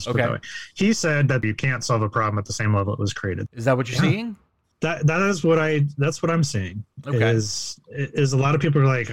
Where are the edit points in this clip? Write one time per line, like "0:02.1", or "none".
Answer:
0:01.4
0:03.4